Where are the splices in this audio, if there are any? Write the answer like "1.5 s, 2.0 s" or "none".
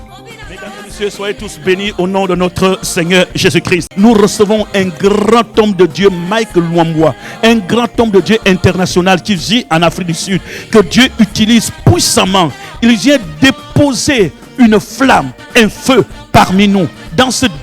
3.9 s